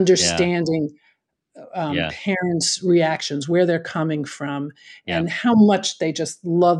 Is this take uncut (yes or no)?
yes